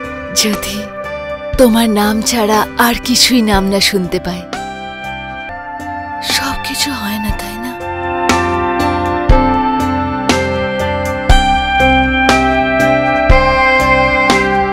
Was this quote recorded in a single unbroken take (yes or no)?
no